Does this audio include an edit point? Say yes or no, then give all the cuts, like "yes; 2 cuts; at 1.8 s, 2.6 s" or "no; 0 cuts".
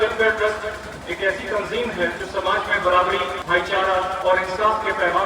yes; 3 cuts; at 2.2 s, 3.4 s, 4.2 s